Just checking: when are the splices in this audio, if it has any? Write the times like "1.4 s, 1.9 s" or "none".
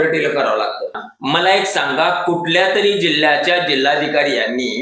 1.0 s